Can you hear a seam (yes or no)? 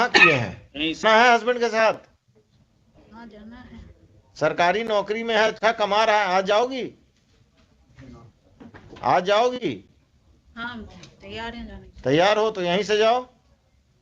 yes